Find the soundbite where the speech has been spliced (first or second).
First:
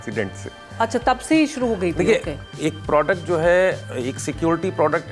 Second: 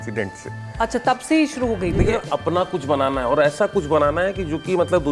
second